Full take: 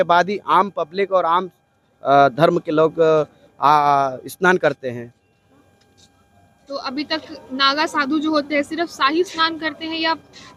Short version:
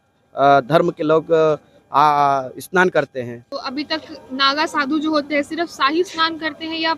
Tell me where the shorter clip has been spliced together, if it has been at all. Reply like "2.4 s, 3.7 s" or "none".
3.4 s